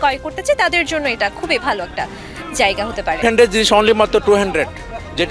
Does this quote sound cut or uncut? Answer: cut